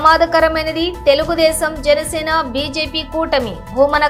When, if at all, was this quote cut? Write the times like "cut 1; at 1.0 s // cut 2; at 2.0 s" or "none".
none

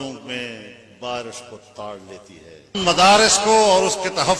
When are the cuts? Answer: cut 1; at 2.8 s

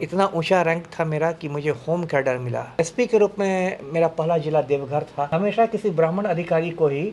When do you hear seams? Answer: cut 1; at 2.7 s // cut 2; at 5.3 s

